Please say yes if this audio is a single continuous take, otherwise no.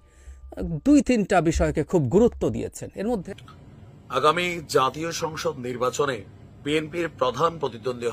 no